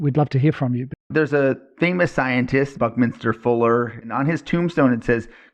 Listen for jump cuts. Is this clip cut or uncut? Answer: cut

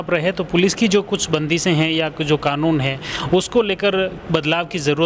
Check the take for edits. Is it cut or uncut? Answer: uncut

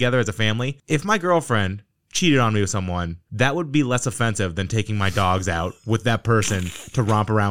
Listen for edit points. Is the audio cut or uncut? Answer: uncut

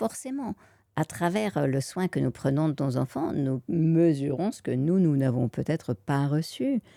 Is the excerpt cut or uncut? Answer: uncut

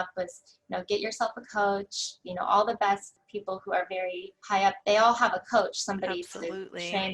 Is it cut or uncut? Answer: cut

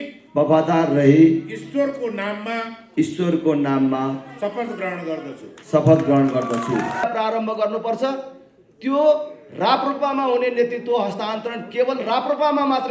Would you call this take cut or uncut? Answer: cut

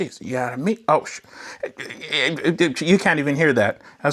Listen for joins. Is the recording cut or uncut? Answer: uncut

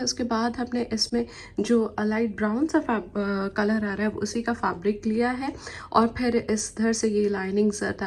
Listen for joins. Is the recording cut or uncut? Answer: uncut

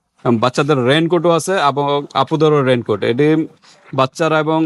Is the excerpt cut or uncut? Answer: uncut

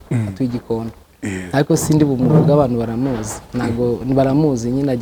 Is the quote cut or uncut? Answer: uncut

